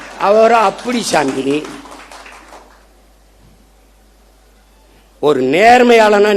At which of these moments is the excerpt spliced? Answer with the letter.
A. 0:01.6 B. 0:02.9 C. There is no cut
C